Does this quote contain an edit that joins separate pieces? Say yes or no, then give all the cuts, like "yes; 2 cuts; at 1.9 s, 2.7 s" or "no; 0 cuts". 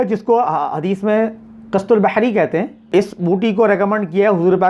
yes; 1 cut; at 2.9 s